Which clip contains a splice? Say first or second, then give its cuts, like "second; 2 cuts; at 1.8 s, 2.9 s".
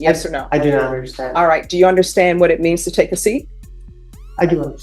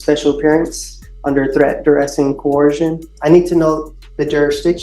second; 1 cut; at 3.1 s